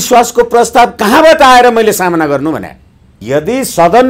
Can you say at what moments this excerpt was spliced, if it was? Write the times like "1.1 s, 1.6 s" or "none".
3.1 s